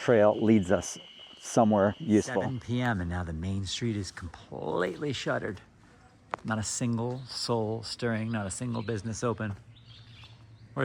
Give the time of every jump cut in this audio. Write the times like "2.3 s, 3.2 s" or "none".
2.4 s